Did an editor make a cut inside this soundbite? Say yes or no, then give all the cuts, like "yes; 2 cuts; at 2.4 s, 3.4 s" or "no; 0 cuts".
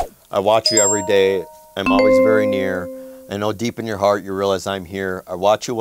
yes; 2 cuts; at 1.7 s, 2.9 s